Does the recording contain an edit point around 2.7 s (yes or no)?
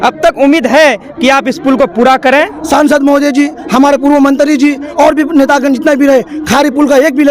yes